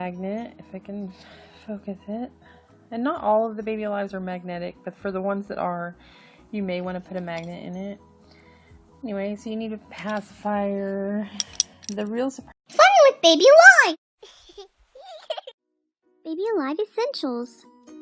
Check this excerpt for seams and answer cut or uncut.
uncut